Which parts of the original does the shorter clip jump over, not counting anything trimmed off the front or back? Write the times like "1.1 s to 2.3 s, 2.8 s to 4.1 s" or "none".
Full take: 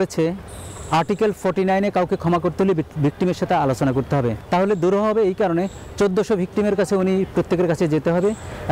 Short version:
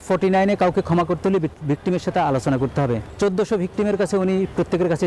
4.4 s to 5.8 s